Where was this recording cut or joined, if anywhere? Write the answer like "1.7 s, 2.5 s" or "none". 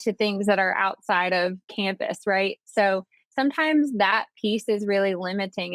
1.6 s